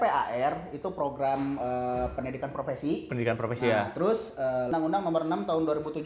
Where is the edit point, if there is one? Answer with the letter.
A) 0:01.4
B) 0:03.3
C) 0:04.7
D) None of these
C